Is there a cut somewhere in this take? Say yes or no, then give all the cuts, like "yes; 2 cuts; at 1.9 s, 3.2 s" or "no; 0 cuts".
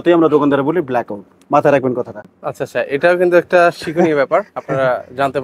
no; 0 cuts